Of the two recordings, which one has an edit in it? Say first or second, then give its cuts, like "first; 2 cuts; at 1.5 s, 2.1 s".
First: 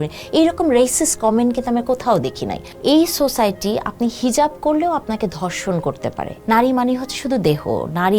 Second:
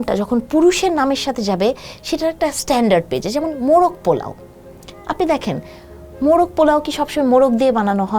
first; 2 cuts; at 2.7 s, 6.3 s